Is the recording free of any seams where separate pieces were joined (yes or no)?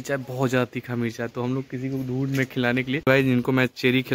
no